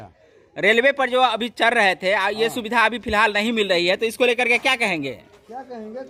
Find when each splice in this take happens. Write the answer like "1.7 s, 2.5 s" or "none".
none